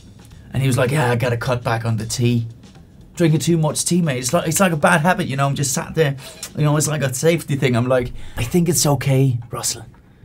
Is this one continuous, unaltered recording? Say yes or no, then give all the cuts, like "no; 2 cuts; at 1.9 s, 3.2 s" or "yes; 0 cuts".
yes; 0 cuts